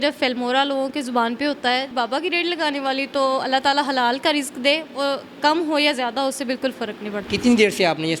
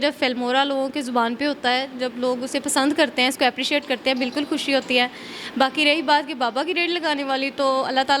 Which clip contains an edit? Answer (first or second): first